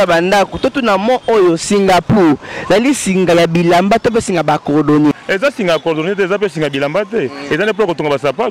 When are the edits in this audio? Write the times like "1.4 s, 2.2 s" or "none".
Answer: 5.2 s